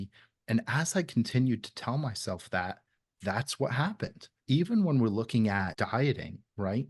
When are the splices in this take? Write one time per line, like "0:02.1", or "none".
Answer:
0:04.3
0:05.7